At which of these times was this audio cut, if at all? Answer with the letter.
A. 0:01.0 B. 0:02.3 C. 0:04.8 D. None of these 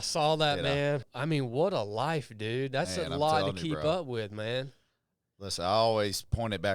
A